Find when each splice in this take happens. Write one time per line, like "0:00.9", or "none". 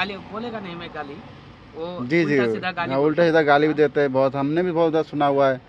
none